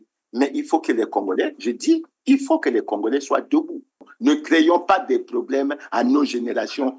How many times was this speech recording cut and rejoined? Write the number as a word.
one